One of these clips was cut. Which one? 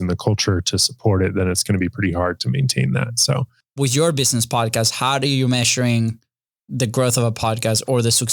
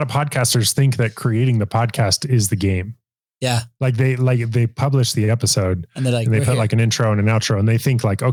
first; 1 cut; at 3.6 s

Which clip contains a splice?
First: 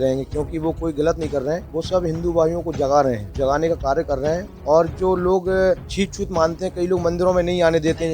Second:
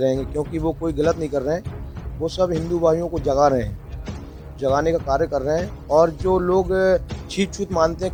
first; 3 cuts; at 1.7 s, 3.3 s, 5.9 s

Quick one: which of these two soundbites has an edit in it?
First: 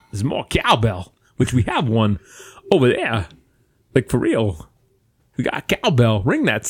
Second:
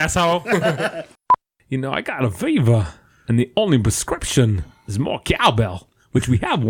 second; 1 cut; at 1.2 s

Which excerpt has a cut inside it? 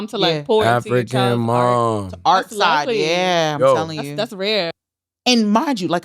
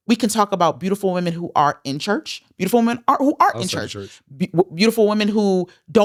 first; 1 cut; at 4.8 s

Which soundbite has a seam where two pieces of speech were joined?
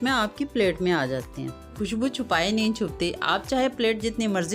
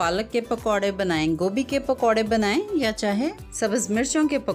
first; 1 cut; at 1.8 s

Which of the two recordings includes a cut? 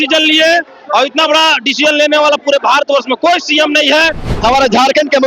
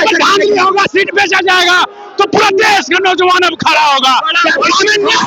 first; 1 cut; at 4.3 s

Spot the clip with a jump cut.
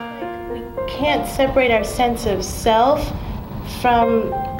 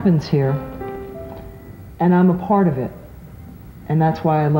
first; 1 cut; at 0.9 s

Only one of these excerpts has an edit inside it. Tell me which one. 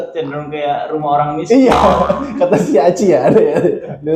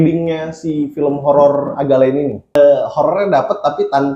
second; 1 cut; at 2.6 s

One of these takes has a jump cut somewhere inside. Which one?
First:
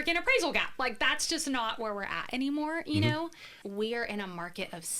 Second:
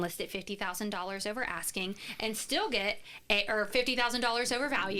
first; 1 cut; at 3.5 s

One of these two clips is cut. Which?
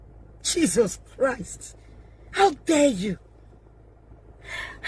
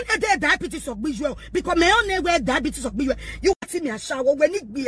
second; 1 cut; at 3.5 s

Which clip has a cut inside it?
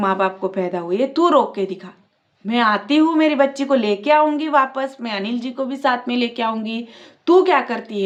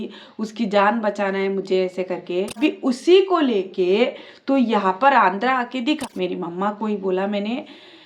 second; 2 cuts; at 2.6 s, 6.0 s

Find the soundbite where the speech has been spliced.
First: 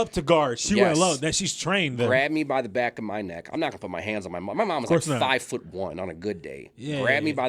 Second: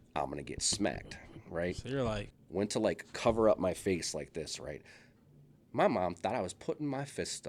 second; 1 cut; at 2.4 s

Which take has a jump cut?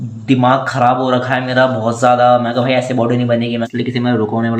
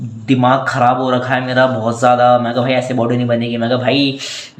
first; 1 cut; at 3.7 s

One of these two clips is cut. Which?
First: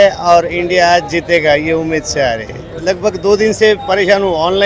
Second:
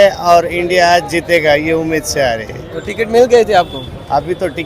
first; 1 cut; at 2.7 s

